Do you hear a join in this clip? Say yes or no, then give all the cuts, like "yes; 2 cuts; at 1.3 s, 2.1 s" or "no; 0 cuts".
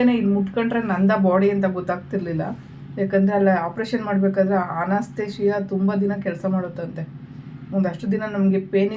no; 0 cuts